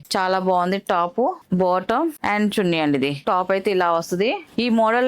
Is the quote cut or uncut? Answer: cut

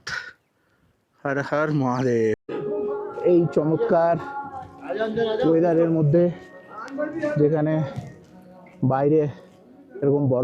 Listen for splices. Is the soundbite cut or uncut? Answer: cut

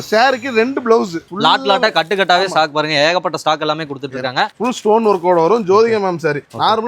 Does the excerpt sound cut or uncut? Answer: cut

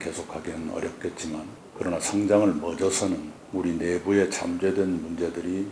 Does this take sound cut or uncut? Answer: cut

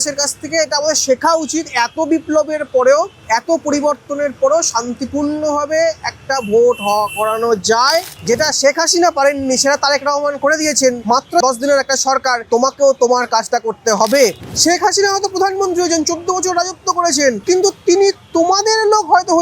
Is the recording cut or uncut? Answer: cut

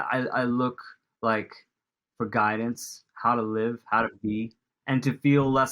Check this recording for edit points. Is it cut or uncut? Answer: cut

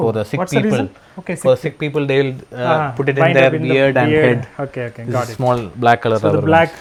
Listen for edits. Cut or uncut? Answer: uncut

